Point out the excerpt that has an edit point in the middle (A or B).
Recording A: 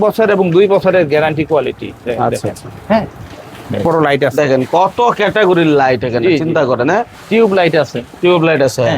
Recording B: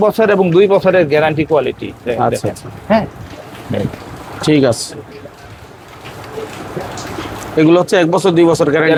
A